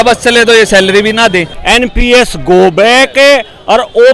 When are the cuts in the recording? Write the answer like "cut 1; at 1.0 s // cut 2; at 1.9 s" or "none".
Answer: cut 1; at 1.5 s